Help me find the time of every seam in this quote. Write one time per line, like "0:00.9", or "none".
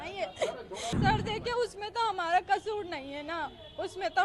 0:00.9